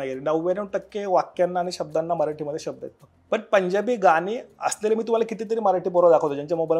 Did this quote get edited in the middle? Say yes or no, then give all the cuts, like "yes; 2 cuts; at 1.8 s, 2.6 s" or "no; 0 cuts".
yes; 1 cut; at 3.0 s